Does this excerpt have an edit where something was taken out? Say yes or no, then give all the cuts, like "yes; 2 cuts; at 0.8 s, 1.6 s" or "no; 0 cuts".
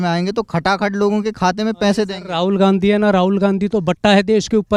no; 0 cuts